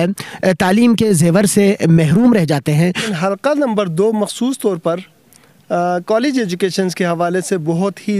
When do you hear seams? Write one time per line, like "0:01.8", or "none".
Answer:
0:03.1